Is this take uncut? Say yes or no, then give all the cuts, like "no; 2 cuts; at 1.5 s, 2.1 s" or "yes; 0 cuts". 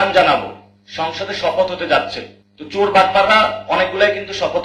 yes; 0 cuts